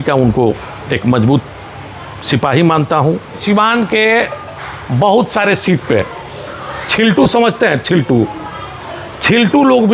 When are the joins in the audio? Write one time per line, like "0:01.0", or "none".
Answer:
0:03.4

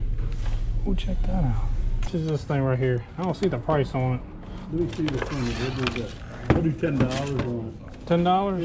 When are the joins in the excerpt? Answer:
0:02.1

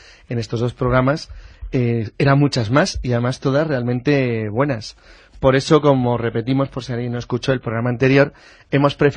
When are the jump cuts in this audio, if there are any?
none

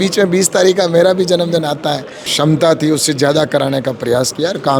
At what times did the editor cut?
0:02.3

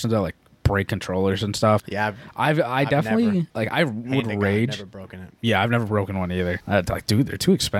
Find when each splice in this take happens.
0:01.9
0:03.5
0:06.6

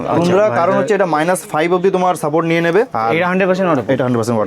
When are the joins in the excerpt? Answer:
0:02.9

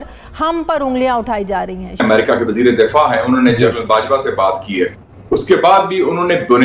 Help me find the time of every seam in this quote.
0:02.0

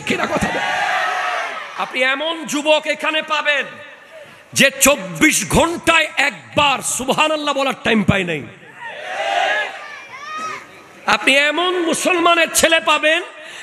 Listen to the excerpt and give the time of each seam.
0:01.7

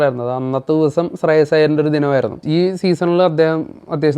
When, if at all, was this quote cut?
0:02.4

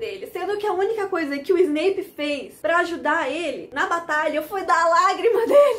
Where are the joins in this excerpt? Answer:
0:03.7

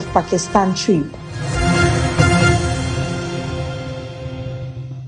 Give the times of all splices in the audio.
none

